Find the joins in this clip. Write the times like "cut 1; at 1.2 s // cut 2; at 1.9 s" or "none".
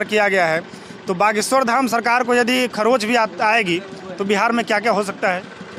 none